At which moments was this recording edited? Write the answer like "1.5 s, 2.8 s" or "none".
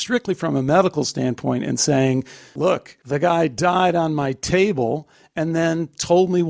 2.6 s